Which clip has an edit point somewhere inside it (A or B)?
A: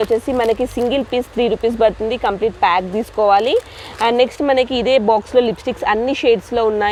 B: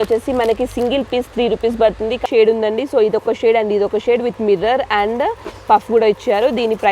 B